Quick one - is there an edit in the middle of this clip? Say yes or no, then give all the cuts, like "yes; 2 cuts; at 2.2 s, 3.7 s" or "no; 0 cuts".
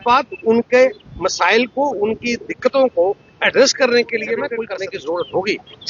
yes; 1 cut; at 4.7 s